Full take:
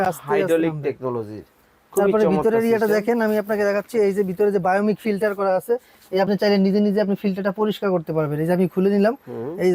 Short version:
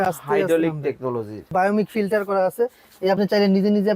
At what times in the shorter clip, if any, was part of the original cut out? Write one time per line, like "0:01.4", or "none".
0:01.5